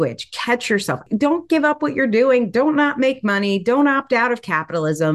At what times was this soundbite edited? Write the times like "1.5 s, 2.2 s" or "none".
1.0 s